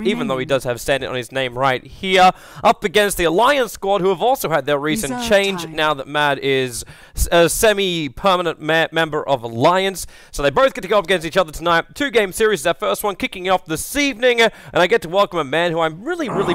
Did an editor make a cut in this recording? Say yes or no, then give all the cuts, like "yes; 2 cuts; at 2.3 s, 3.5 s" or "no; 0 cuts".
no; 0 cuts